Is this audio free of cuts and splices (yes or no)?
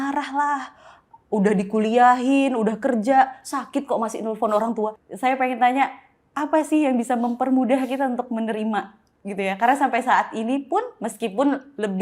no